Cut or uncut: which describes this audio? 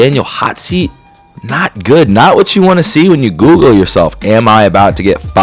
uncut